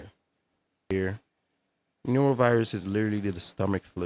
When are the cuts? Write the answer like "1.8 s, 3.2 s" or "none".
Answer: 0.9 s